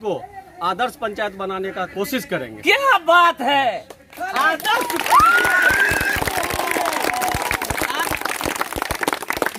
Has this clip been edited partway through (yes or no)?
no